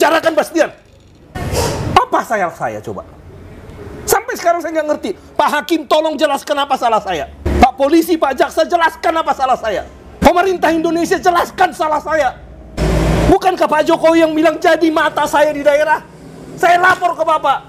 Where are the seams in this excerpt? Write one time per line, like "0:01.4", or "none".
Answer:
0:10.2
0:12.8